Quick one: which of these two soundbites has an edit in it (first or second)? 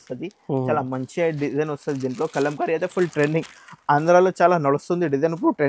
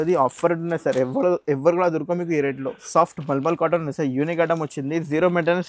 second